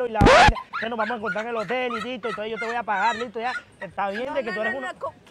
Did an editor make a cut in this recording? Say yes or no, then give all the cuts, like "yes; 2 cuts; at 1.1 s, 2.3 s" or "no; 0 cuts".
no; 0 cuts